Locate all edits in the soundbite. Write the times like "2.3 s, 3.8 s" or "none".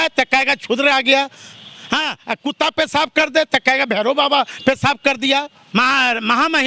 5.6 s